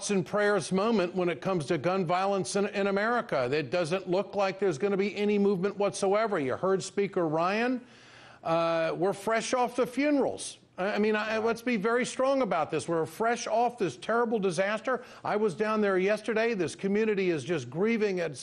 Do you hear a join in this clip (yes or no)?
no